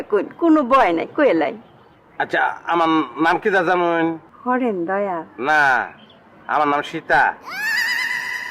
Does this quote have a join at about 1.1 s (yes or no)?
no